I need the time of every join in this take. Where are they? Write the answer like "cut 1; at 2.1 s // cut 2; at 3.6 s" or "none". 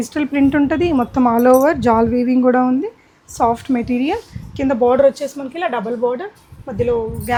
none

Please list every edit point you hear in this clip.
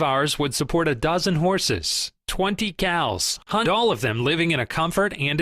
cut 1; at 3.6 s

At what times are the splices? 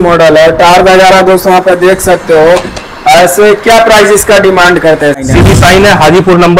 cut 1; at 5.2 s

